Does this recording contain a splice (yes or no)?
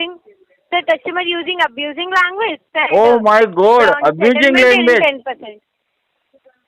no